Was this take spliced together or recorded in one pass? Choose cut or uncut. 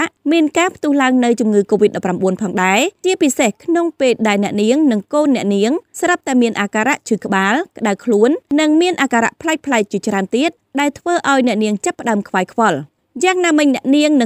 uncut